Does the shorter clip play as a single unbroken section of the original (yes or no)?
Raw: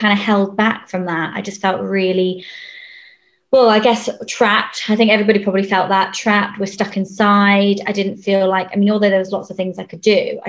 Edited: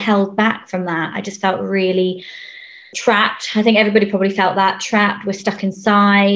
no